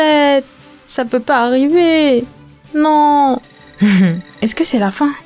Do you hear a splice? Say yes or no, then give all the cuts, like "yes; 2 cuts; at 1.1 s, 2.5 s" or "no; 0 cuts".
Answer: yes; 1 cut; at 4.3 s